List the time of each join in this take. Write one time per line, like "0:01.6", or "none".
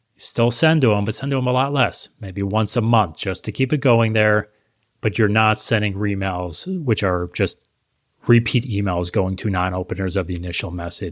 none